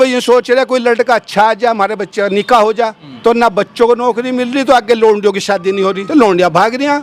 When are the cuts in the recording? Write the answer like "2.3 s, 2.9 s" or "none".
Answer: 3.0 s, 6.0 s